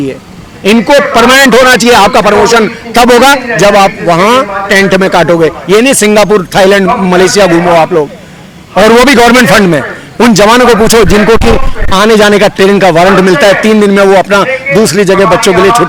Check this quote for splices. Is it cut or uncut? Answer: uncut